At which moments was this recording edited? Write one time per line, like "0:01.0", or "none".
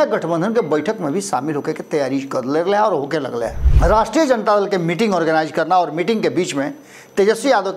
0:03.6